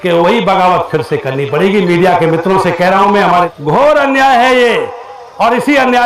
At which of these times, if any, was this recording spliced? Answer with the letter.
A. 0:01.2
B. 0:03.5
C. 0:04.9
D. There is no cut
B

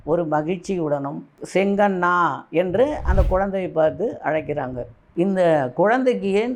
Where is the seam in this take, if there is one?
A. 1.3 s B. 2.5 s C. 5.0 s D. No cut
C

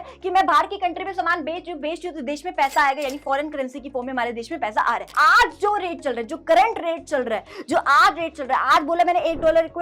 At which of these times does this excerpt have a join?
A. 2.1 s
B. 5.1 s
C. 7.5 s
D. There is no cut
B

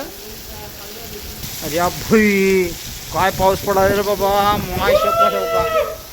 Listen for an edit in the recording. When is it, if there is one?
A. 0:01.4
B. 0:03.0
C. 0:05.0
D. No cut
A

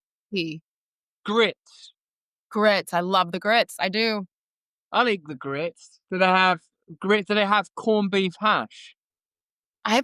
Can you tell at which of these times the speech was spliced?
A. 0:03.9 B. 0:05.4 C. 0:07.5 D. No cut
D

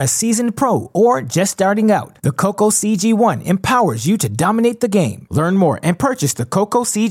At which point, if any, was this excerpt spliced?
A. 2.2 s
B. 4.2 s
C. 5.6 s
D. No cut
D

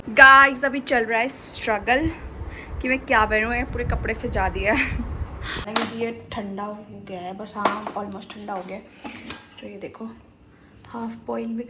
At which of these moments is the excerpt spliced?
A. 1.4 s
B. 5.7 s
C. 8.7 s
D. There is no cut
B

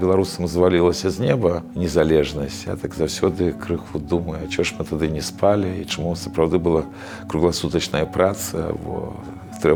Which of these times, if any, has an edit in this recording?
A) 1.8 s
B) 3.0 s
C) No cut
C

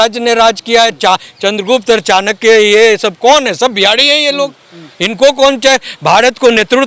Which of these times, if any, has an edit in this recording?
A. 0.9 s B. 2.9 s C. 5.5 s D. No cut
D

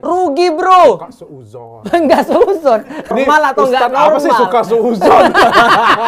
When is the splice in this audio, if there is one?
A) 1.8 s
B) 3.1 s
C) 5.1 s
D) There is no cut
B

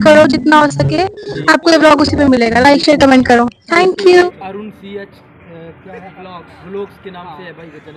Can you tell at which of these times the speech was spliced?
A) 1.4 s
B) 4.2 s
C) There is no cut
B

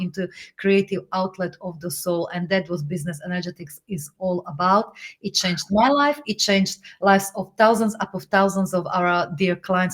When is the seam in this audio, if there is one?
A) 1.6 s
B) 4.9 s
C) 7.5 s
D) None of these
D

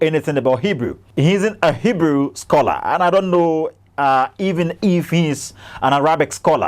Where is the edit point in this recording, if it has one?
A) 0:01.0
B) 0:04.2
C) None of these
A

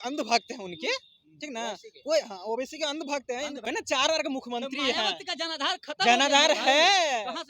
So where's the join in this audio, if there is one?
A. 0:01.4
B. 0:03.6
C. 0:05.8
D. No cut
B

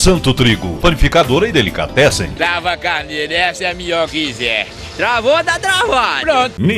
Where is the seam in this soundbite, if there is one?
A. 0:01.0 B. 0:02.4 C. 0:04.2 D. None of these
B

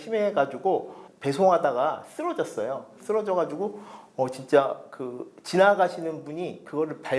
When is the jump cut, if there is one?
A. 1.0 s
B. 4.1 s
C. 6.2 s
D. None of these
A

